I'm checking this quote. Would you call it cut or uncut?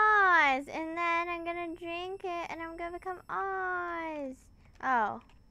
uncut